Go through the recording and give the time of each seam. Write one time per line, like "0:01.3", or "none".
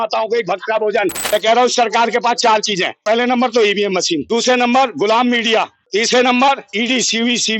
0:01.2
0:03.0
0:04.2
0:05.8
0:06.7